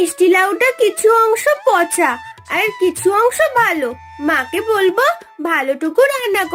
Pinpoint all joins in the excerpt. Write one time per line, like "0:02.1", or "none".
none